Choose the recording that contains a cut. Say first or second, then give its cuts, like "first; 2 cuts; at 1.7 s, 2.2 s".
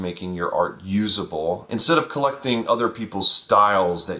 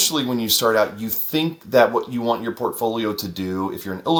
first; 1 cut; at 1.6 s